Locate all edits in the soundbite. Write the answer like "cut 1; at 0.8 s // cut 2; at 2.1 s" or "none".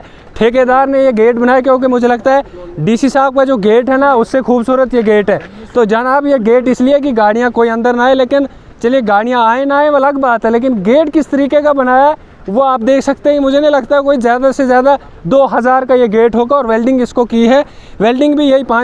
none